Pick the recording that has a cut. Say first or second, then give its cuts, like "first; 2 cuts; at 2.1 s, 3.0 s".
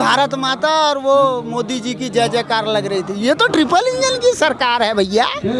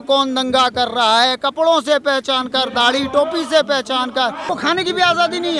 second; 1 cut; at 4.5 s